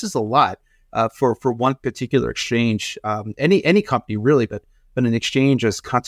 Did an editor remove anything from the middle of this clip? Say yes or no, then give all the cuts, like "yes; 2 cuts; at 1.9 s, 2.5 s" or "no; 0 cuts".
no; 0 cuts